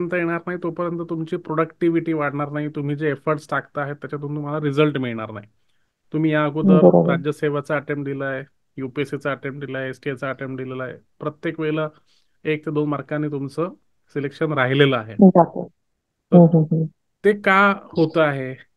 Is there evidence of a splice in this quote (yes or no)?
no